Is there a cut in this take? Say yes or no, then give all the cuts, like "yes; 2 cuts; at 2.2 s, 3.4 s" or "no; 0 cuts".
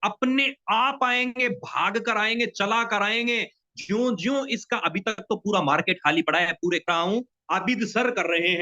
yes; 1 cut; at 6.9 s